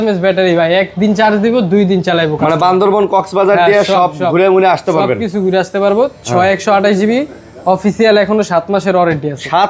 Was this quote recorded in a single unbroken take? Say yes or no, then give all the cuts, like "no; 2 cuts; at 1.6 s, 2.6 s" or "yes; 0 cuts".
yes; 0 cuts